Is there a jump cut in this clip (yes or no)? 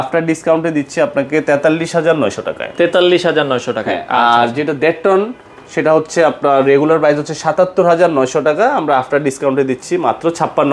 no